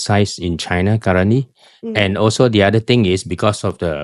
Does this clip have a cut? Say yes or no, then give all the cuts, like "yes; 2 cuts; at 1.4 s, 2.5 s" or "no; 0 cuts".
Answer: no; 0 cuts